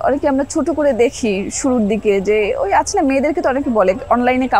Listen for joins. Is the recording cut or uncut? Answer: uncut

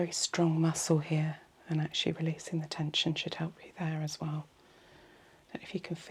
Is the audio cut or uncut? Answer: uncut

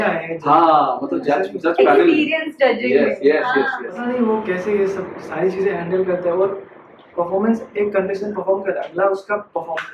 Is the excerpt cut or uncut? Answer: cut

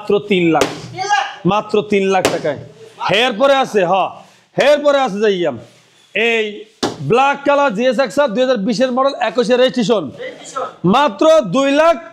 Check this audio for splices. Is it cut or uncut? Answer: uncut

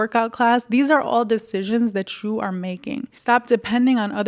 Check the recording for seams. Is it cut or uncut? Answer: cut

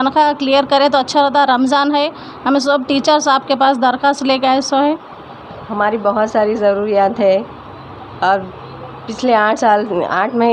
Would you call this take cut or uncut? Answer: uncut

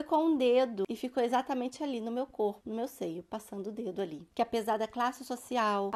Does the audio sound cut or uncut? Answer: cut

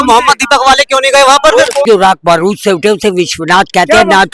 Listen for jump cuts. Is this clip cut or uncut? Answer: cut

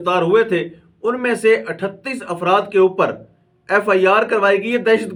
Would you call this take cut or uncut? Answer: uncut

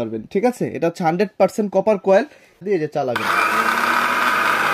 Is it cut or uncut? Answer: cut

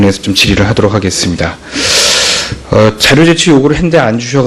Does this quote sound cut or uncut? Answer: uncut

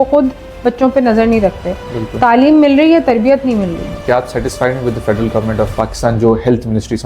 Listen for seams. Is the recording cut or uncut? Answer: cut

